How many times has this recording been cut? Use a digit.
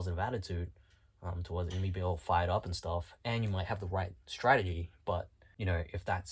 1